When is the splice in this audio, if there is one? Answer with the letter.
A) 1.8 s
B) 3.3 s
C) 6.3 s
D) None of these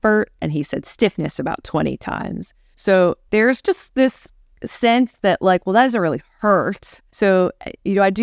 B